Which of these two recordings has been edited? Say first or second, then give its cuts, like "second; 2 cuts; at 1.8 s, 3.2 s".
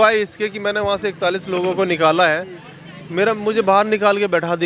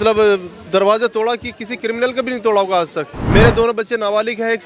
second; 1 cut; at 3.2 s